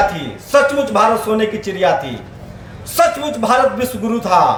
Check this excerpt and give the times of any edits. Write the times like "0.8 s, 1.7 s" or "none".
none